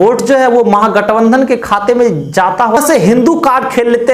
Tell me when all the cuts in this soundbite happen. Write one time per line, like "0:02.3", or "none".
0:02.8